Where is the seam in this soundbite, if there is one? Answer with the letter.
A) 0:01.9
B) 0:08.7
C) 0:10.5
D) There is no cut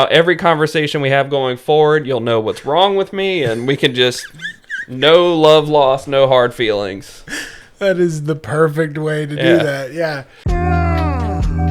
C